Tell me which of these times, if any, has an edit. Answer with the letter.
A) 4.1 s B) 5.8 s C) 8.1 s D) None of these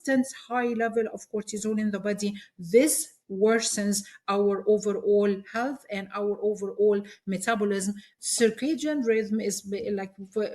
C